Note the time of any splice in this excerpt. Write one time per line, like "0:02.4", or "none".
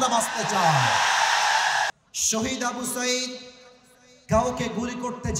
0:01.9